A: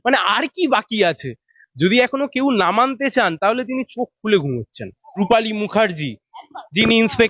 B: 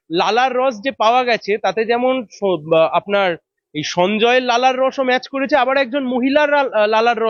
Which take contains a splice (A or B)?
A